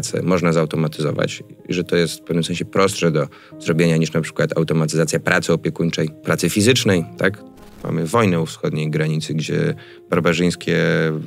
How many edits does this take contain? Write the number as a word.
two